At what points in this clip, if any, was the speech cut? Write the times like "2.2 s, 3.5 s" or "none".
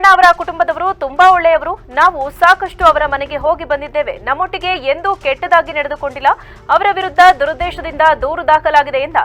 none